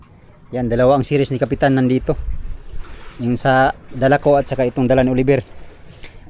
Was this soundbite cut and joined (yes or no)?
no